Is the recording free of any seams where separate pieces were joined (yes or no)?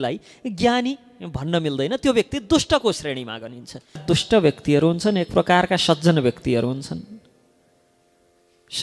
no